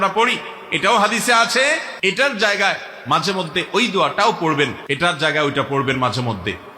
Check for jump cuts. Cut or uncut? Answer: cut